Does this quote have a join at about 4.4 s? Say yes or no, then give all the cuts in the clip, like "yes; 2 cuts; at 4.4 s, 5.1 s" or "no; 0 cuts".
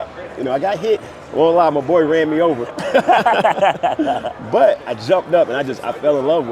no; 0 cuts